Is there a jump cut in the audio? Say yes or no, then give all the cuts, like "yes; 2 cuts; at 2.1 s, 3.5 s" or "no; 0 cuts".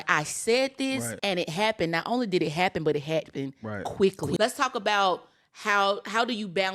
yes; 2 cuts; at 1.1 s, 4.4 s